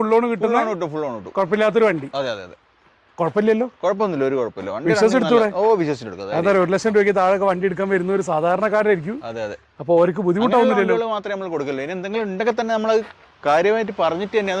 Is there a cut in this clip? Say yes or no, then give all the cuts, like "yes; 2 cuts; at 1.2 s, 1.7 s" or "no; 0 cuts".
no; 0 cuts